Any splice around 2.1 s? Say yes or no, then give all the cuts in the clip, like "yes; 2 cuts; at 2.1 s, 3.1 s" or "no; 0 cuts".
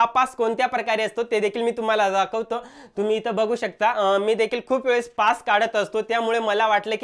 no; 0 cuts